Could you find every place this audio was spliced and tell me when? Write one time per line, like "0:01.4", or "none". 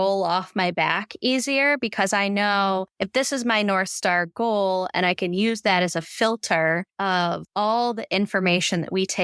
0:03.0
0:07.1